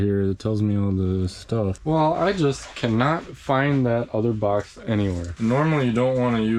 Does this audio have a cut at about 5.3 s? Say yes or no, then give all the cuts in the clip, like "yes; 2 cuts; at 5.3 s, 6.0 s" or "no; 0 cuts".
yes; 2 cuts; at 1.8 s, 5.3 s